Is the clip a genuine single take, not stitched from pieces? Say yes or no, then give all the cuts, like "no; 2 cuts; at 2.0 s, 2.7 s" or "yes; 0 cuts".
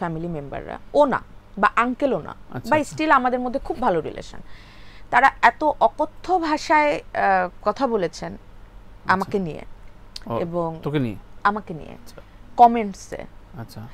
yes; 0 cuts